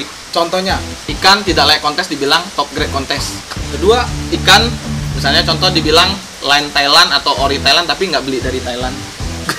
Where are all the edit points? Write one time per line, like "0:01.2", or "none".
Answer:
0:01.0
0:03.6
0:04.2